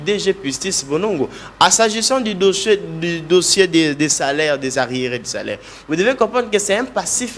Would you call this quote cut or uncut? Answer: uncut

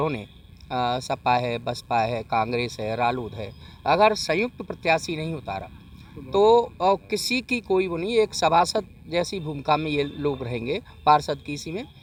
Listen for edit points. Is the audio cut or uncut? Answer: uncut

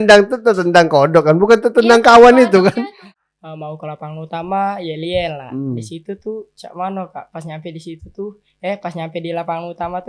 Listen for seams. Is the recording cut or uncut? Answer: cut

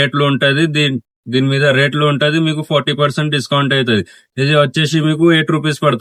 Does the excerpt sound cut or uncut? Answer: uncut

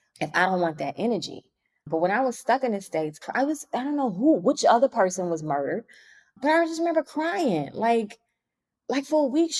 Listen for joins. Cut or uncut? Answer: uncut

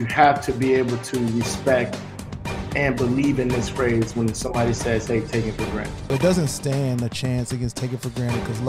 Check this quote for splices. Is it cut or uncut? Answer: cut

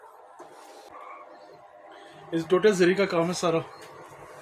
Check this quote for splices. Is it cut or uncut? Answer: cut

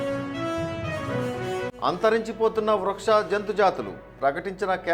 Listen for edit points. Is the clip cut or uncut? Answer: cut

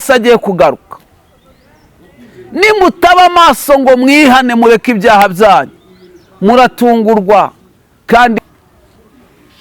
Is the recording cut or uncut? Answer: cut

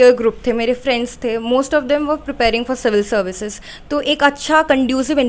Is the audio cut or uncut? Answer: uncut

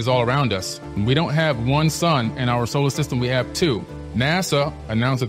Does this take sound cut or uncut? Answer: cut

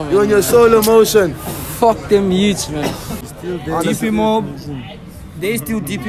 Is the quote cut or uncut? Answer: cut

